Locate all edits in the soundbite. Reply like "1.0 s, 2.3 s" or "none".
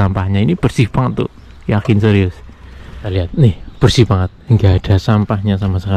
3.1 s